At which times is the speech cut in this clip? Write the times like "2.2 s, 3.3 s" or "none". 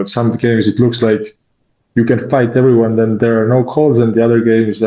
none